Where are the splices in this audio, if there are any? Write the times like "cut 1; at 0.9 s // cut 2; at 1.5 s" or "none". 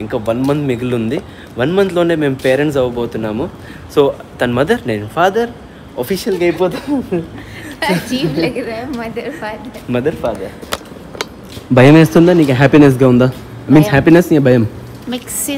none